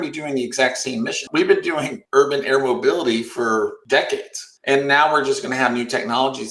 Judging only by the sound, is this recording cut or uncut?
cut